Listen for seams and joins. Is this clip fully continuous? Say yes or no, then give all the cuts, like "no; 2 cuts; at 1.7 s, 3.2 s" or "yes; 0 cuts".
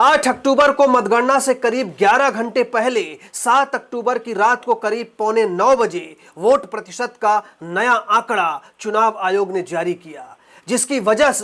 yes; 0 cuts